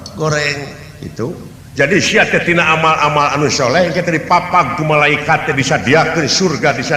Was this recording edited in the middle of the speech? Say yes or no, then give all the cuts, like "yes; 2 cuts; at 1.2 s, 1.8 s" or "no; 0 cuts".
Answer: yes; 1 cut; at 1.6 s